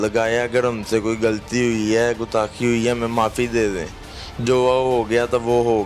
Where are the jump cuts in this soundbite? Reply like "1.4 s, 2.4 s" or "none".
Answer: none